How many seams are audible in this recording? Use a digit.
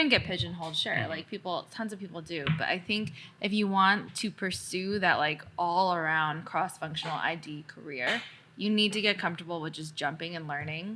1